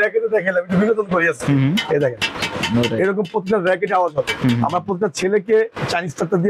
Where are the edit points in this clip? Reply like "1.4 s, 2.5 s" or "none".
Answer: none

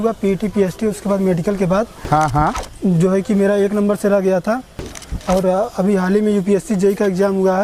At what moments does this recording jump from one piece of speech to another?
none

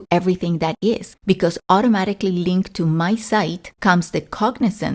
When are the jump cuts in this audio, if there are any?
1.1 s, 3.6 s

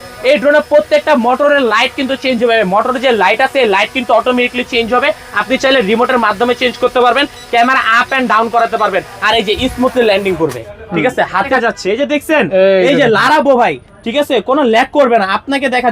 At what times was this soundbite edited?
11.5 s

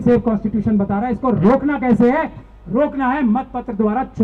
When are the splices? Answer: none

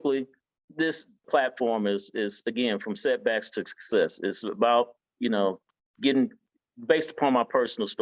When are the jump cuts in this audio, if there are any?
1.3 s

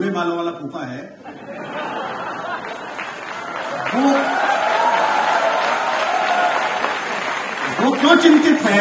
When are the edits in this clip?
none

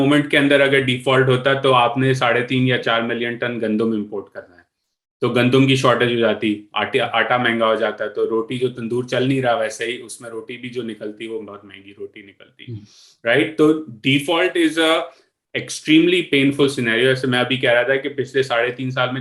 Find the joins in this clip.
none

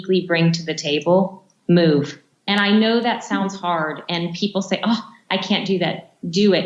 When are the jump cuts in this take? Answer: none

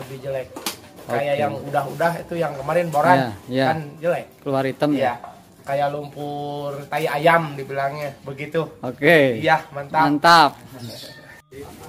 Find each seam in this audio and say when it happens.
none

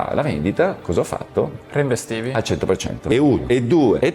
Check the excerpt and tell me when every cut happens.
2.8 s

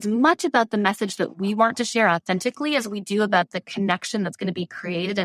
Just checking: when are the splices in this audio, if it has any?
none

